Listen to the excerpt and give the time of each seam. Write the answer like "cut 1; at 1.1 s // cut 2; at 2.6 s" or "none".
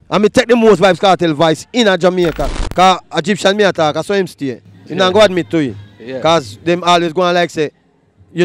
cut 1; at 2.5 s